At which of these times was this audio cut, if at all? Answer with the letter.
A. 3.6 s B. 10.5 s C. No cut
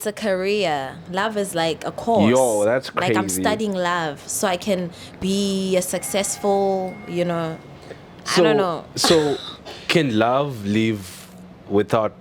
C